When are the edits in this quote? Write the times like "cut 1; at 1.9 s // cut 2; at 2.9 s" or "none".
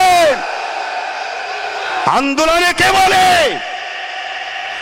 none

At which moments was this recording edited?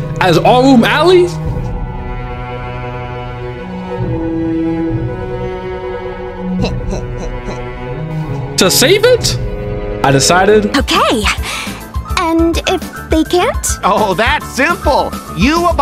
cut 1; at 10.7 s

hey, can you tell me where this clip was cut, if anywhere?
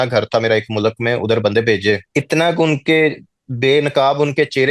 cut 1; at 2.0 s

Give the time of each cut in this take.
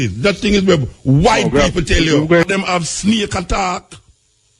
cut 1; at 2.5 s

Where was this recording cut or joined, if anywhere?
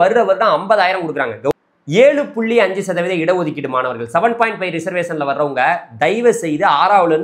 cut 1; at 1.5 s

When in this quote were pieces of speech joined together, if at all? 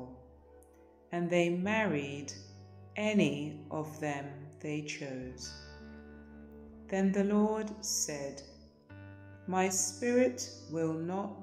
cut 1; at 5.3 s // cut 2; at 6.9 s

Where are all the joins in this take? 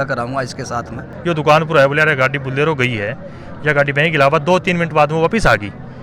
cut 1; at 1.0 s

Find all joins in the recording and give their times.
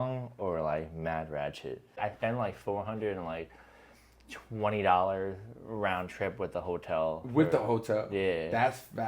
cut 1; at 2.0 s

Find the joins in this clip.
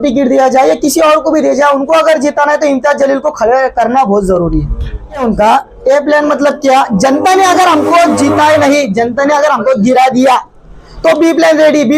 cut 1; at 5.2 s

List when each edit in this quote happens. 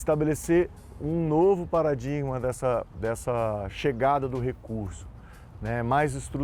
none

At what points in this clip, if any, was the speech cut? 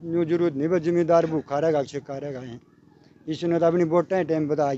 none

